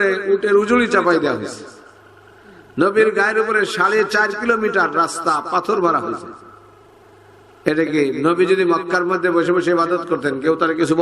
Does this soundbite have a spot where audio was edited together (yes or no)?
no